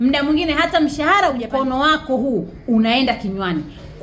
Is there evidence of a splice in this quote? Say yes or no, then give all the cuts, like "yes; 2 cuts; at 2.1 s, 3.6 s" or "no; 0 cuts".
yes; 1 cut; at 1.5 s